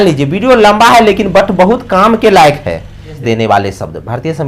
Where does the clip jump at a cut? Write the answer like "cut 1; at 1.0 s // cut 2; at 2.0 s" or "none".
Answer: cut 1; at 3.2 s